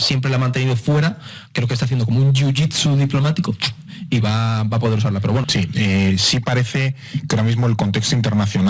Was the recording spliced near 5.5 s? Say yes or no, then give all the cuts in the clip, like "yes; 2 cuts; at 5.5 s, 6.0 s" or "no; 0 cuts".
yes; 1 cut; at 5.5 s